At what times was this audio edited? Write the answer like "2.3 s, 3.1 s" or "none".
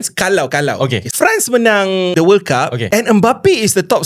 1.0 s, 2.1 s, 2.8 s